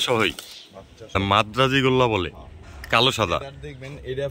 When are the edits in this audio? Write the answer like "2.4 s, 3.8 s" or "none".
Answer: 1.2 s